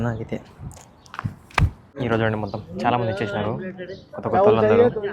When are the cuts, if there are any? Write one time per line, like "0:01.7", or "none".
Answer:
0:01.8